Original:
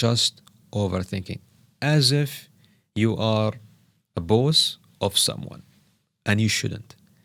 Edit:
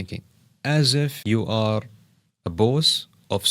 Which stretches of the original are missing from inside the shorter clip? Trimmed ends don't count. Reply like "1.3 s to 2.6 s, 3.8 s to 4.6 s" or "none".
2.3 s to 2.9 s